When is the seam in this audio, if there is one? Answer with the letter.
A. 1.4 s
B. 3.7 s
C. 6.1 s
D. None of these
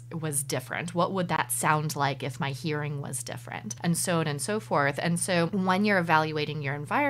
B